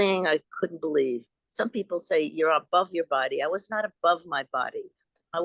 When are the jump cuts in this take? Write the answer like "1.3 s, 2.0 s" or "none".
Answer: 1.4 s